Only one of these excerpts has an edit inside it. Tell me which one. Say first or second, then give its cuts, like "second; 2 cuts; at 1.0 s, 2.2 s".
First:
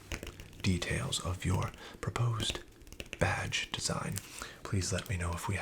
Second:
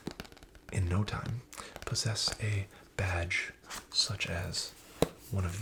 first; 1 cut; at 4.5 s